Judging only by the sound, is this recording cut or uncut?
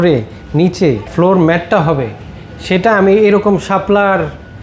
cut